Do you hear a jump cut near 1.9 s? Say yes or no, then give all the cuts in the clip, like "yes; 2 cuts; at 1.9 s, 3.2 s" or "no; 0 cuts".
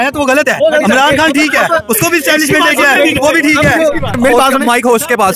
no; 1 cut; at 4.2 s